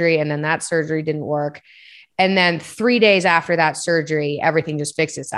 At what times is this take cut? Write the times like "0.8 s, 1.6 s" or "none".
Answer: none

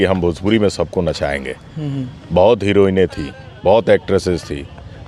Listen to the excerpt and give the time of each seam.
none

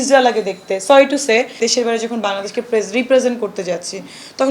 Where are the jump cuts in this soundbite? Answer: 1.6 s

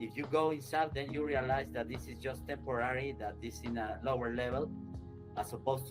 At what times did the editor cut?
4.9 s

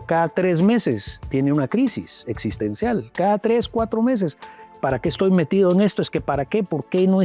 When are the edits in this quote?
none

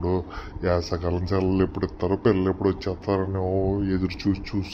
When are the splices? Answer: none

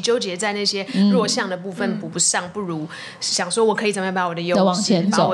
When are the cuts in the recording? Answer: none

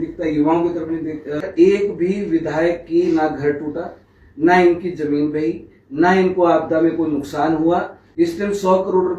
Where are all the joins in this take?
1.4 s, 8.0 s

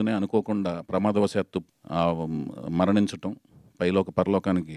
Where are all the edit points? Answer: 1.8 s

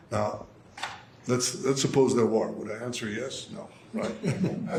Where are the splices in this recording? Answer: none

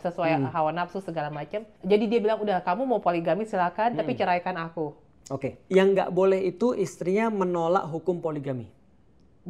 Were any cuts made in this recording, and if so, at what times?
1.7 s, 5.6 s

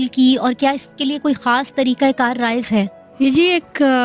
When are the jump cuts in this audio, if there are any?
3.0 s

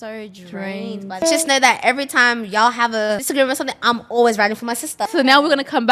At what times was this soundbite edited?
1.2 s, 3.2 s, 5.1 s

